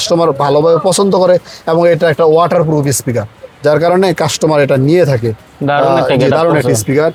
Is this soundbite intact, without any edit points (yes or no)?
yes